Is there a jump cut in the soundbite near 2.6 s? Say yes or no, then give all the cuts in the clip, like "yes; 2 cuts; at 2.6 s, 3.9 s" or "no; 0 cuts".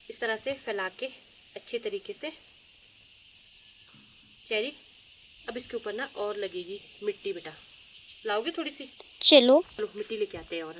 no; 0 cuts